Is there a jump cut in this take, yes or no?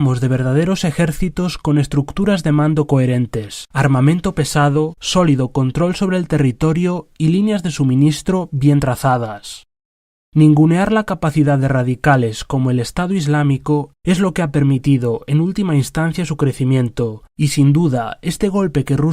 no